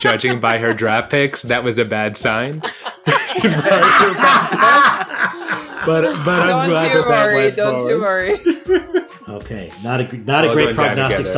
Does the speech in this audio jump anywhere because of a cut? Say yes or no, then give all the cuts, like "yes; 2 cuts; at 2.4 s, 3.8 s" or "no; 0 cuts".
yes; 1 cut; at 9.2 s